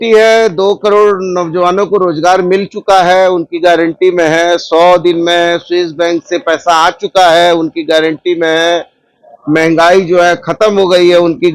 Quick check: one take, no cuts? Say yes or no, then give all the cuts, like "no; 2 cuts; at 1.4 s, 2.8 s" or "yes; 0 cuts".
yes; 0 cuts